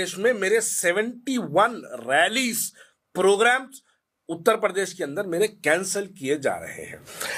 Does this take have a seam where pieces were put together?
no; 0 cuts

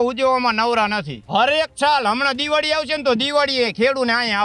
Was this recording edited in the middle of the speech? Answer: yes; 1 cut; at 1.1 s

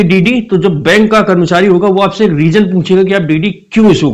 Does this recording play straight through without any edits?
yes; 0 cuts

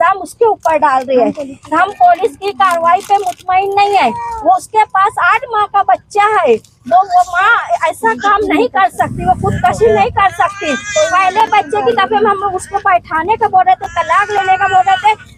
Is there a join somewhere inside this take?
no; 0 cuts

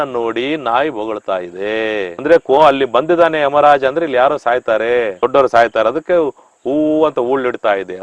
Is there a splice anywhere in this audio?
no; 0 cuts

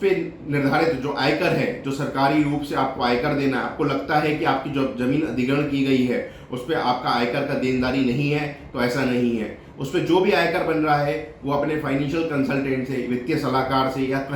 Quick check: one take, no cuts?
yes; 0 cuts

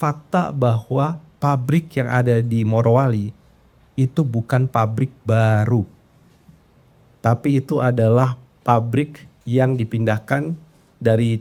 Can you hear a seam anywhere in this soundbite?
no; 0 cuts

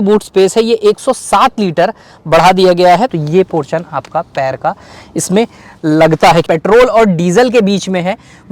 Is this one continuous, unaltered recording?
no; 2 cuts; at 3.1 s, 6.4 s

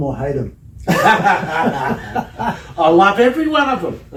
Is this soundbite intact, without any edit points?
yes; 0 cuts

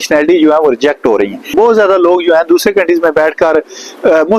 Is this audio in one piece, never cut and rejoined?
no; 1 cut; at 1.5 s

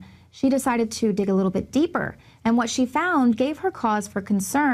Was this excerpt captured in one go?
no; 1 cut; at 3.8 s

